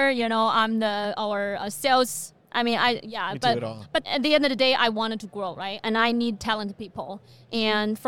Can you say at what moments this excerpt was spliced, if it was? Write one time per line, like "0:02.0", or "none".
0:04.0